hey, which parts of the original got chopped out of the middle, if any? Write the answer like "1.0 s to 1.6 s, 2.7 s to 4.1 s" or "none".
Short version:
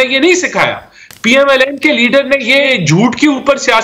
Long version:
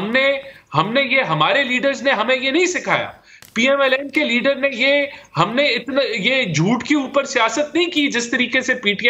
5.0 s to 6.3 s